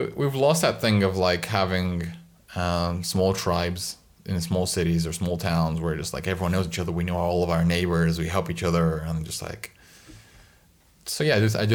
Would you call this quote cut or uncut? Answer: uncut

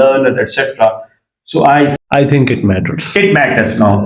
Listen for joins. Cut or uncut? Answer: cut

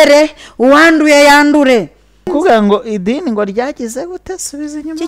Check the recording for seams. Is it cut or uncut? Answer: cut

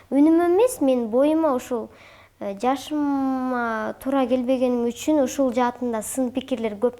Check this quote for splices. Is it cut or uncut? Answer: uncut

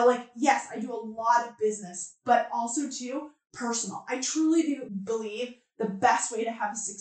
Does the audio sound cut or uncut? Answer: cut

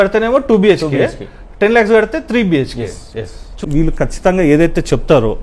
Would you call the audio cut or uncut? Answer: cut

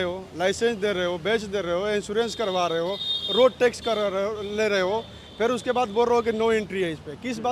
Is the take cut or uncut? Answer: uncut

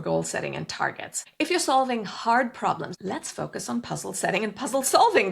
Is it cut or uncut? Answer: cut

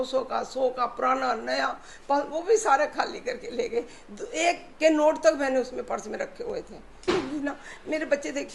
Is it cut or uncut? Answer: cut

